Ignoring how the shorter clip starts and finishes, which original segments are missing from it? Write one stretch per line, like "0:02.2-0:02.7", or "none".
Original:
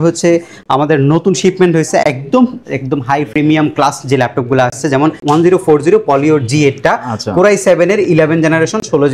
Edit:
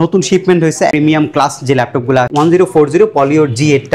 0:02.0-0:03.3
0:04.7-0:05.2